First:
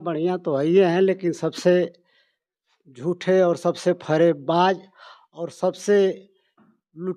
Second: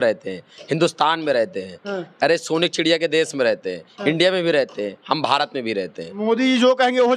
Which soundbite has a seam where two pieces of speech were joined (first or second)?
second